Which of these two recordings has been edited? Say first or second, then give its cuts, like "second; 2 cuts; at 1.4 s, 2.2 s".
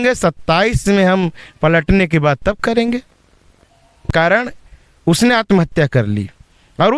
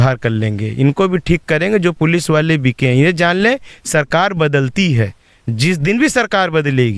first; 1 cut; at 4.1 s